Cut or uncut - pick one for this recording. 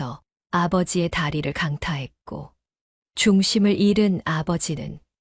uncut